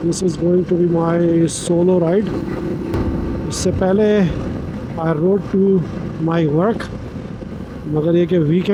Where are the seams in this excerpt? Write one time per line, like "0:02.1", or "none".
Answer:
none

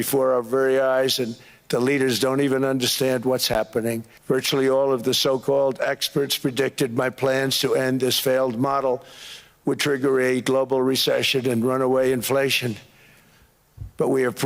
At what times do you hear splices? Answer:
0:04.1

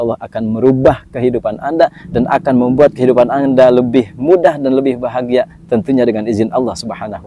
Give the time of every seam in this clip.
0:02.0

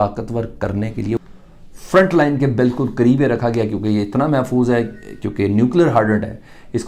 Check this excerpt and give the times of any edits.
0:01.2

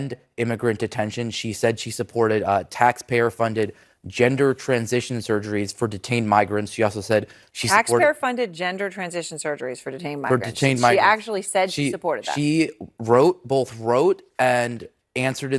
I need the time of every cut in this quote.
0:12.9

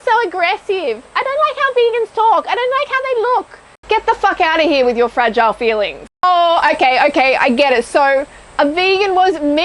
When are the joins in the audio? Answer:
0:03.7
0:06.0

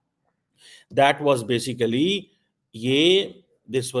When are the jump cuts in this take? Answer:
none

